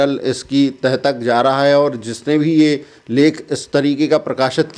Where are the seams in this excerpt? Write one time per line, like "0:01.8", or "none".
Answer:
none